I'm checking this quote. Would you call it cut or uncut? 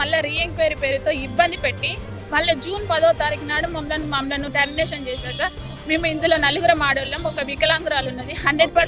uncut